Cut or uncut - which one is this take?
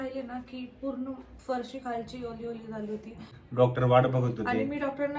cut